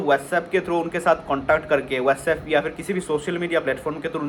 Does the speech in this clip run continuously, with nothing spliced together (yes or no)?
yes